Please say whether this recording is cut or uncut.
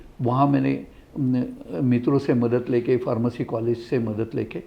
uncut